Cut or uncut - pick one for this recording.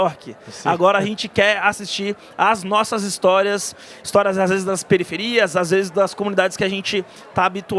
uncut